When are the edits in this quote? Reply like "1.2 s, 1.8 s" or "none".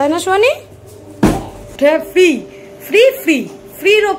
1.7 s